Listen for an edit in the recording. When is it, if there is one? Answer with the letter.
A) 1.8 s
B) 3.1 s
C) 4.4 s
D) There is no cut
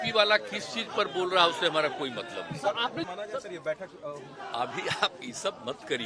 B